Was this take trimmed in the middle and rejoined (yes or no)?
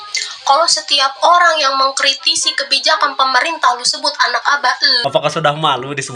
yes